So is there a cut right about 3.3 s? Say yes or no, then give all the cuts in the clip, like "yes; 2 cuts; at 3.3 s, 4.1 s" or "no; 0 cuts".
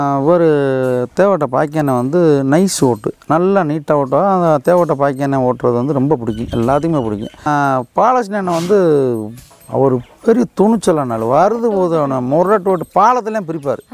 no; 1 cut; at 7.5 s